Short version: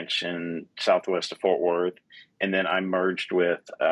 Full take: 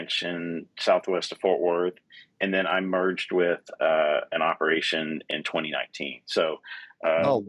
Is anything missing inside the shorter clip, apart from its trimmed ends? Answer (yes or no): no